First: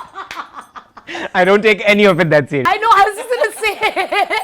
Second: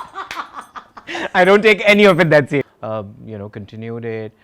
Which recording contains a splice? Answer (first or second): second